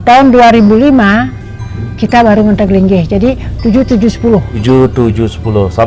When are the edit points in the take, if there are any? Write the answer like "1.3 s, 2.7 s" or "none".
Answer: 4.6 s